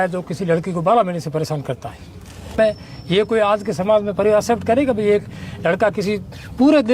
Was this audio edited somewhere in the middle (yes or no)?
yes